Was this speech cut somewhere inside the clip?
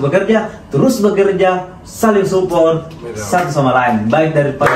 no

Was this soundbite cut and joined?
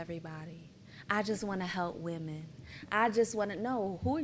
no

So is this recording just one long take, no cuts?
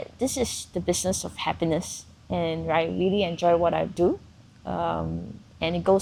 yes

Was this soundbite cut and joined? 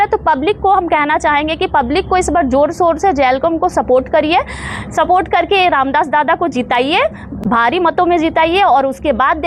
no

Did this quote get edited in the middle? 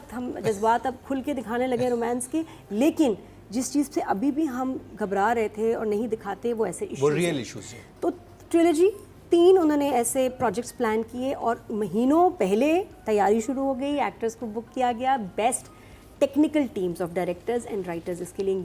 no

